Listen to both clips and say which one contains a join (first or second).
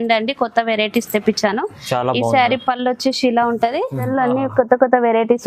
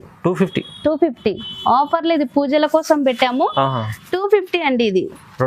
first